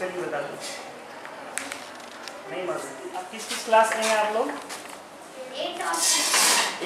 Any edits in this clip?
yes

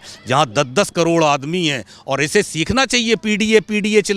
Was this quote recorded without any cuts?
yes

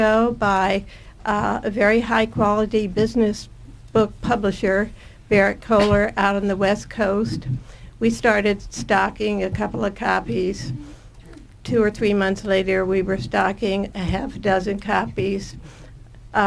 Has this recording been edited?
no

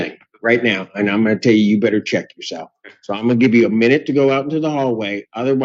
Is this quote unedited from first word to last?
yes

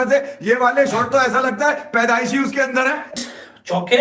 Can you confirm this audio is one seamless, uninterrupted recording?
no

